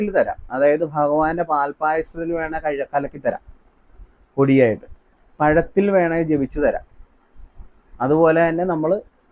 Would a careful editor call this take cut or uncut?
uncut